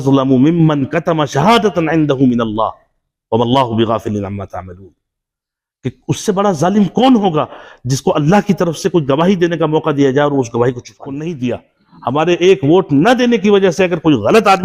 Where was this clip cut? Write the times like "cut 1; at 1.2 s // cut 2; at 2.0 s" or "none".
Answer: cut 1; at 11.2 s